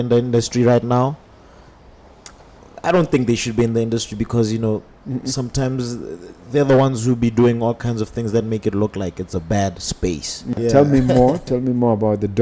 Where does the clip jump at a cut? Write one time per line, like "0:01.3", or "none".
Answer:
0:10.6